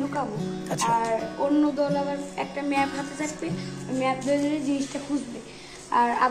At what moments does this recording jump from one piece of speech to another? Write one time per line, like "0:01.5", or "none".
none